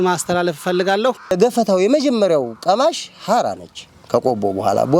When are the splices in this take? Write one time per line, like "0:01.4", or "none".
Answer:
0:01.3